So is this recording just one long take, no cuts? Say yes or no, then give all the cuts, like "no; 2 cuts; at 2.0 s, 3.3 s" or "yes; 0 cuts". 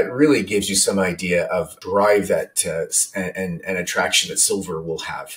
no; 1 cut; at 1.8 s